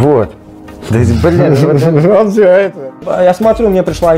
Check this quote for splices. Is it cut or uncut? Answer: cut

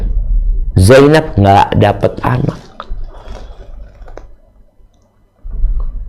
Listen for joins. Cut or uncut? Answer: uncut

